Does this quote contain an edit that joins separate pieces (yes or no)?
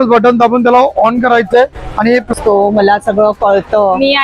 yes